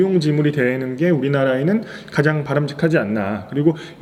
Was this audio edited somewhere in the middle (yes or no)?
no